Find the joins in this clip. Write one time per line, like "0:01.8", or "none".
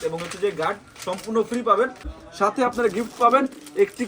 0:02.2

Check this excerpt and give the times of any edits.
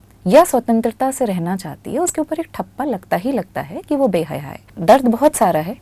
0:04.7

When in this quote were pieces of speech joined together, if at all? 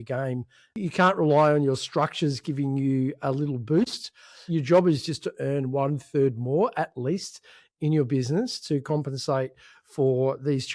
0:00.8
0:04.4

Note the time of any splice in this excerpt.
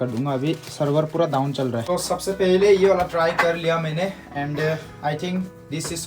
0:01.9

